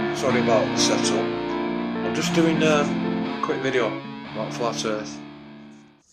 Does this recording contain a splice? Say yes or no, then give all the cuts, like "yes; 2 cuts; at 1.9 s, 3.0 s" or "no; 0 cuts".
no; 0 cuts